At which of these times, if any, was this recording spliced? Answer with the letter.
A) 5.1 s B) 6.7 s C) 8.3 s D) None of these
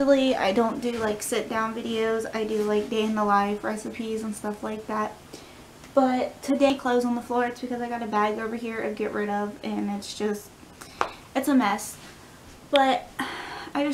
B